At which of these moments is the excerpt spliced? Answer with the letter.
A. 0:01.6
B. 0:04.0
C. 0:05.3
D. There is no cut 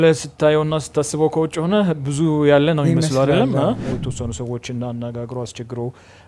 B